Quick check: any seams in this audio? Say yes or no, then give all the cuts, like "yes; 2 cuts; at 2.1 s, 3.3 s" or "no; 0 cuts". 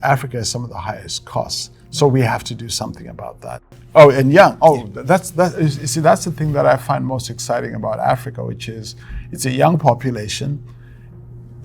yes; 1 cut; at 3.6 s